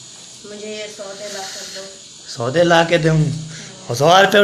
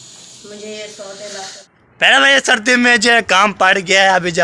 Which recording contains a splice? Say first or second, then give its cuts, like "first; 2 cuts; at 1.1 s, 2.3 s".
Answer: second; 1 cut; at 1.6 s